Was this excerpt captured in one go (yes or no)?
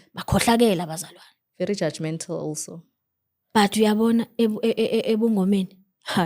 yes